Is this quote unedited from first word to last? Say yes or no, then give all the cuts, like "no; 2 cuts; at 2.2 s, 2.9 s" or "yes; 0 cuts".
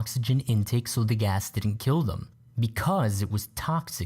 yes; 0 cuts